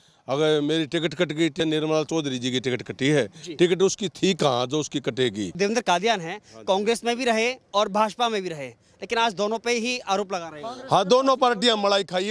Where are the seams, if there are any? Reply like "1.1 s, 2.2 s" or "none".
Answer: 1.5 s, 5.5 s